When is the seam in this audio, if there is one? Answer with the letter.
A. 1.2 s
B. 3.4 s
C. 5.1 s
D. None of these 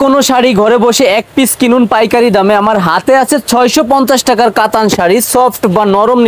D